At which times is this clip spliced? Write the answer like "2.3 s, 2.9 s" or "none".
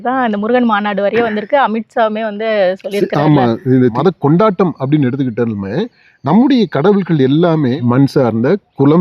3.9 s, 7.8 s